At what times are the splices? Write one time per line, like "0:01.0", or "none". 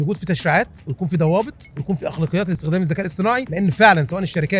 0:01.7
0:02.6
0:03.5